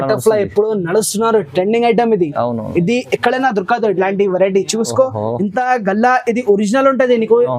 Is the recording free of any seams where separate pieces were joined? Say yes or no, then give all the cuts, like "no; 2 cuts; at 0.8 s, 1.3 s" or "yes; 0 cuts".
yes; 0 cuts